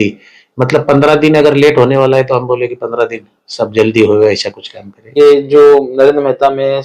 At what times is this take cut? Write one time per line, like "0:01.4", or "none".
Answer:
0:05.1